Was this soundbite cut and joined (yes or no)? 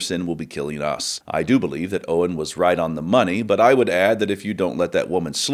yes